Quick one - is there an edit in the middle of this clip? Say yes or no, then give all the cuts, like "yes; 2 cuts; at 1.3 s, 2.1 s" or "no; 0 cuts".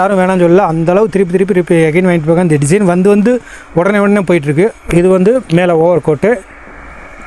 yes; 1 cut; at 4.8 s